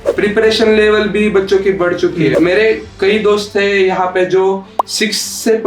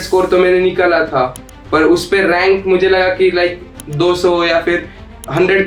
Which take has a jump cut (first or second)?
first